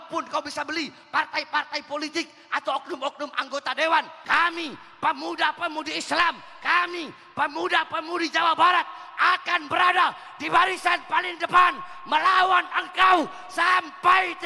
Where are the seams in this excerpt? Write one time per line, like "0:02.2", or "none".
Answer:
0:04.2